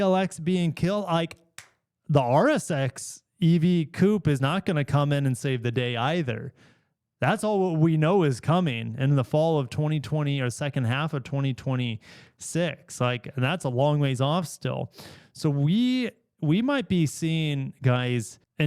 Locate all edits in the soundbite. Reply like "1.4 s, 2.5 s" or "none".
none